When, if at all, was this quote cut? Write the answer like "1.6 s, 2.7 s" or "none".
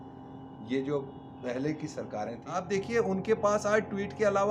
2.5 s

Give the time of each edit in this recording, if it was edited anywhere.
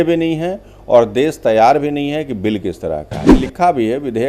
3.3 s

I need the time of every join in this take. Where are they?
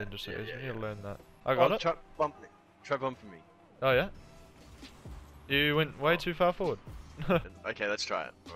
1.3 s, 7.5 s

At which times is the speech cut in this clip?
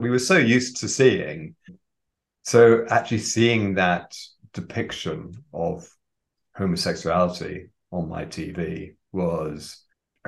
2.0 s

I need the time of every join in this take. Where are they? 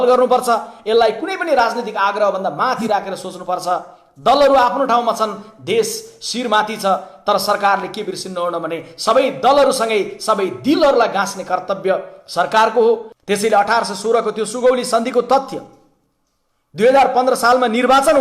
13.1 s

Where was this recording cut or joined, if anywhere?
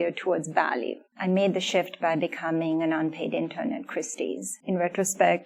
1.0 s

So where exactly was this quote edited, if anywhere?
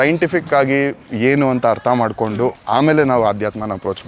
2.6 s

